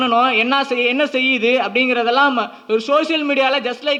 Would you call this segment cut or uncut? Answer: uncut